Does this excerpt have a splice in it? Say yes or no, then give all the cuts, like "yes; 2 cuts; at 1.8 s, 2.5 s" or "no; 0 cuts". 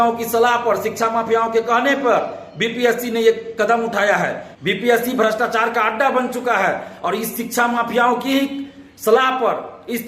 yes; 1 cut; at 4.5 s